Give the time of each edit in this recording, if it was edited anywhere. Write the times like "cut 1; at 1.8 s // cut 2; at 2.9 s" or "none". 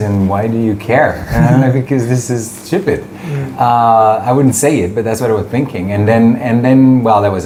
none